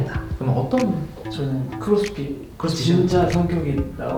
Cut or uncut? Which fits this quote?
uncut